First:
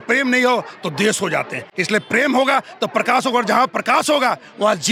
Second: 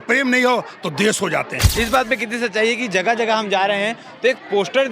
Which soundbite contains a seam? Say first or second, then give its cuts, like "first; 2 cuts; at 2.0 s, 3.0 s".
second; 1 cut; at 1.6 s